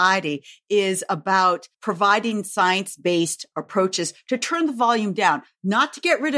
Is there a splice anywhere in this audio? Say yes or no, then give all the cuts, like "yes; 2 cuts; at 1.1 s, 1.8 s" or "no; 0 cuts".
yes; 1 cut; at 1.7 s